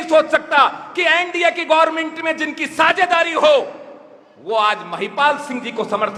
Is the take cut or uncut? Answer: uncut